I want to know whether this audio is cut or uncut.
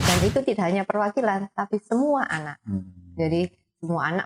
uncut